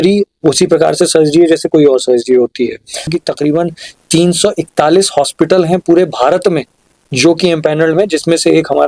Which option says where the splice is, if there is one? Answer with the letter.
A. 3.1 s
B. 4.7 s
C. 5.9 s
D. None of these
A